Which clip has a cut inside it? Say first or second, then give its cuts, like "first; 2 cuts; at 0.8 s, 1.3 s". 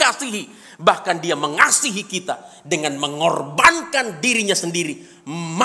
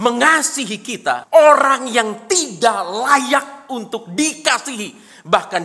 second; 1 cut; at 1.2 s